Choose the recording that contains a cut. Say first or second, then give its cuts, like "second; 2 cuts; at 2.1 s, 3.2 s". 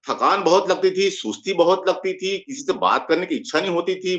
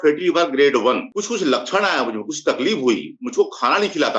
second; 1 cut; at 1.1 s